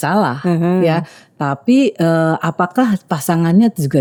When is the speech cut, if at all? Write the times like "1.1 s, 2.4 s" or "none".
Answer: none